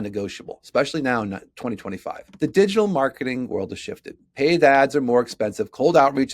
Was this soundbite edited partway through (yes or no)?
yes